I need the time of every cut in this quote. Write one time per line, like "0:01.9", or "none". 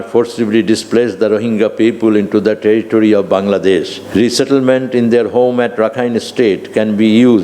0:04.0